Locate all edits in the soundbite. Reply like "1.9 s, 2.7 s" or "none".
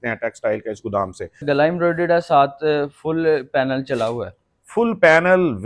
1.4 s